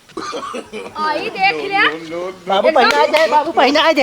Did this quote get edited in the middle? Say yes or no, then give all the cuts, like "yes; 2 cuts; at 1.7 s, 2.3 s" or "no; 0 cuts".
yes; 1 cut; at 0.9 s